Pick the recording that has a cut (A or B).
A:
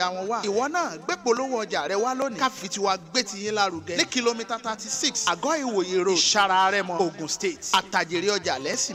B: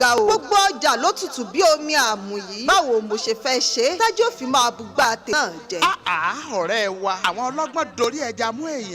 B